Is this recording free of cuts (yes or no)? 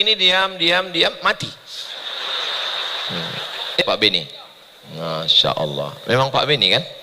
no